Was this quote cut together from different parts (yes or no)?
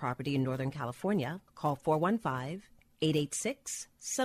yes